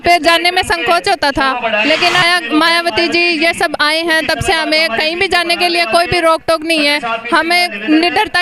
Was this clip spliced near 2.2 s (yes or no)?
yes